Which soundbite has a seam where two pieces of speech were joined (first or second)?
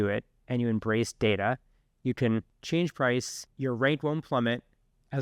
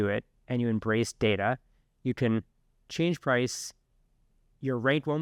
first